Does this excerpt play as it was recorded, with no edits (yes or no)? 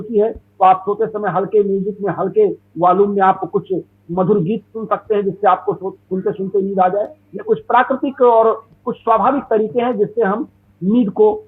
yes